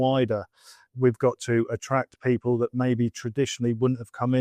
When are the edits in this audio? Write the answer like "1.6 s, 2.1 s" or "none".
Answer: none